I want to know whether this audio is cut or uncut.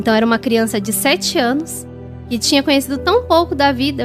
uncut